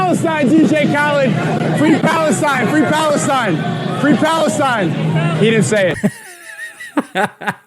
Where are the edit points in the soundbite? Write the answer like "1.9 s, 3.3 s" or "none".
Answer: 6.0 s